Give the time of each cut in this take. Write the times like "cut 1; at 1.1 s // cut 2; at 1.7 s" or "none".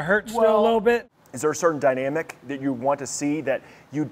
cut 1; at 1.0 s